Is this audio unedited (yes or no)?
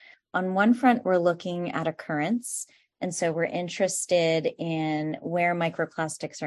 yes